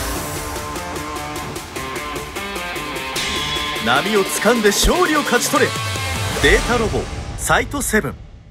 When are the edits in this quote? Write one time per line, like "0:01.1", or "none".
none